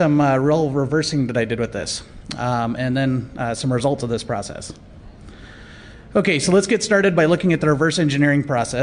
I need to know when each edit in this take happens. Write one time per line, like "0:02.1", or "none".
0:05.7